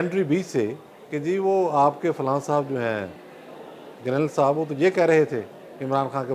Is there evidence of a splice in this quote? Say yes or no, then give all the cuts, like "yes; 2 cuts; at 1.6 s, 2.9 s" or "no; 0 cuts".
no; 0 cuts